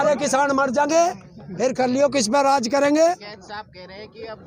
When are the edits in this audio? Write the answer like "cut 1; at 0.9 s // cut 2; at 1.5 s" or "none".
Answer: none